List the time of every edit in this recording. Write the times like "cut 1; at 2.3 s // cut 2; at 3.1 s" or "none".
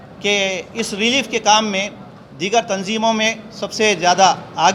none